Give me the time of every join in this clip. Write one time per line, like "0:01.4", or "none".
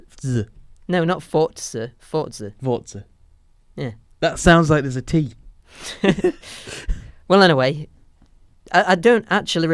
none

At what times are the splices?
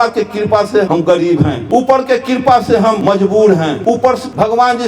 0:01.0
0:03.0
0:04.0

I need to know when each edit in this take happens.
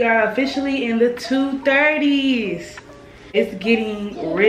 0:03.1

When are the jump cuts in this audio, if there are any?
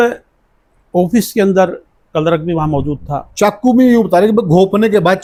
none

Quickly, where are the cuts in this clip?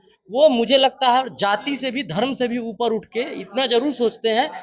none

